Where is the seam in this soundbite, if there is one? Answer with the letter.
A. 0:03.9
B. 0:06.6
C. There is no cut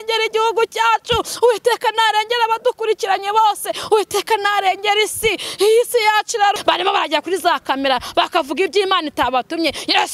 B